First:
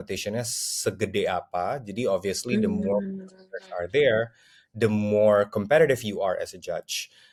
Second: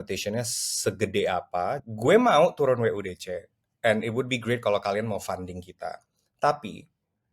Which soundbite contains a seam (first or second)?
second